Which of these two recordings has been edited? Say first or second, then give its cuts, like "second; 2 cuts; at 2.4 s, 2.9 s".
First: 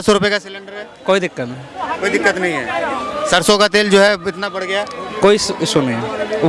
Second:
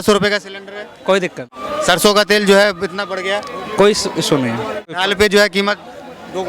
second; 2 cuts; at 1.6 s, 4.9 s